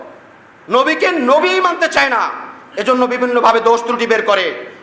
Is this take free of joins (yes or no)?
yes